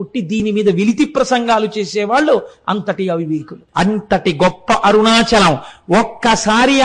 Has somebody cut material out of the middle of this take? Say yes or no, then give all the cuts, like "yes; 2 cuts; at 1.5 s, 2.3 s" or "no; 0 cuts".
yes; 1 cut; at 3.6 s